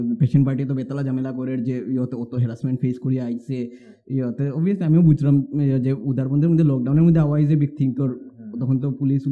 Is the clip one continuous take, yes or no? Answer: yes